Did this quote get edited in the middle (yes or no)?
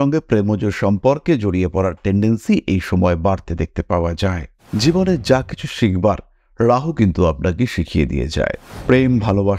yes